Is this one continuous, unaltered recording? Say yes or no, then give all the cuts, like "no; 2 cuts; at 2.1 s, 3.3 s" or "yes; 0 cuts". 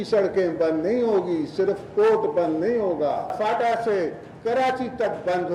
no; 1 cut; at 3.3 s